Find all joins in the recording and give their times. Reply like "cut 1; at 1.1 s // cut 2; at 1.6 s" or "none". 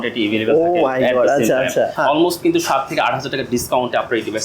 cut 1; at 1.9 s